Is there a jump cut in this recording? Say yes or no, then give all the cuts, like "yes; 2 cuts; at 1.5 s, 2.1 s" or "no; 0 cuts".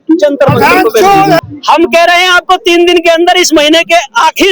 yes; 1 cut; at 1.4 s